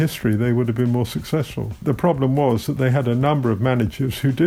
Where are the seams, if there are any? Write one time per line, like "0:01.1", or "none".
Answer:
0:01.8